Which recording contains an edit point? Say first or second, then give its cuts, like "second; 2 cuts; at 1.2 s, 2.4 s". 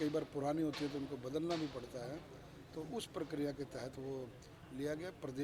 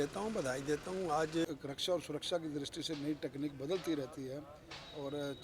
second; 1 cut; at 1.5 s